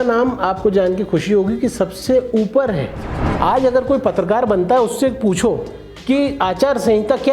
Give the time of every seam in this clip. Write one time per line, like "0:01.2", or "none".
0:03.2

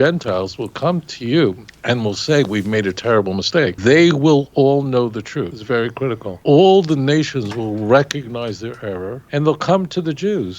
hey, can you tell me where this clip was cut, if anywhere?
0:01.7
0:03.8
0:05.6
0:06.3
0:09.1

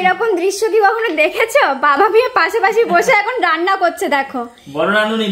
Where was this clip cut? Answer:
none

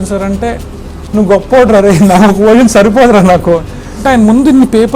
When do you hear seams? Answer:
0:03.9

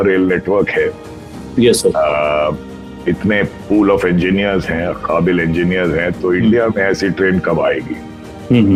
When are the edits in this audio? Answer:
none

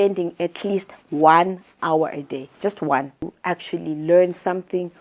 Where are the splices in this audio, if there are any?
0:03.4

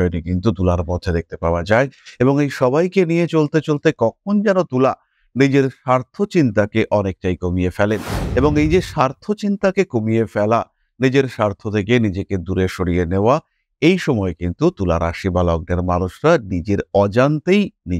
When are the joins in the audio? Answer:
none

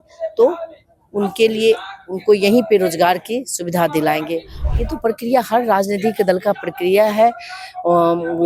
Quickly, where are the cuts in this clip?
0:04.5

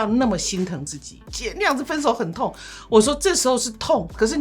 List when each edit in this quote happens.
0:01.2

